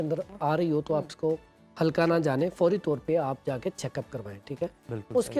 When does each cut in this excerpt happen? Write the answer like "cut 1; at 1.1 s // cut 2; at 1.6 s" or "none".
none